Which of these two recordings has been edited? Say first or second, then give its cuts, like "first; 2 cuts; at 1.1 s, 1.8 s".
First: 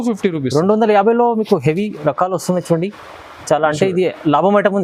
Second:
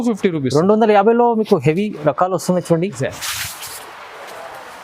second; 1 cut; at 3.0 s